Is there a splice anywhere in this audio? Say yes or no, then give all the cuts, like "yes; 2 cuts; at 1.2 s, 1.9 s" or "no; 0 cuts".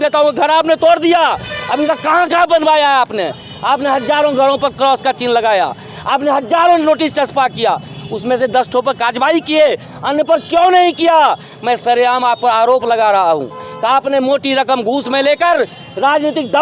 no; 0 cuts